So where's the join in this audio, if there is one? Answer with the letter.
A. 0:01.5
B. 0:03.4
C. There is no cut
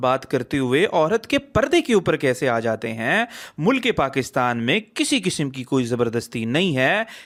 C